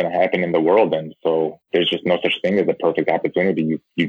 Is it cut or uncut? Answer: uncut